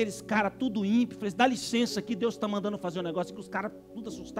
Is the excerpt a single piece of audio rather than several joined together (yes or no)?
yes